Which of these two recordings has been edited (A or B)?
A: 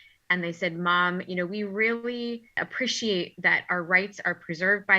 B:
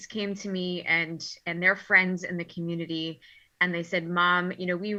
A